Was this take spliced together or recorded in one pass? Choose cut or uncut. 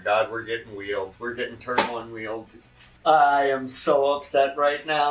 cut